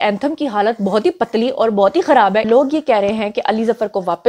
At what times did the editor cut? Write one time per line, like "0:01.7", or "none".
0:02.5